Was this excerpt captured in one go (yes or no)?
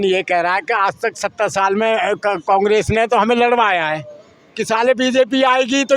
yes